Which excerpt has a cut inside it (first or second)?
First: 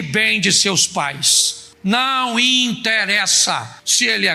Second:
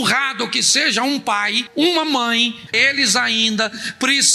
second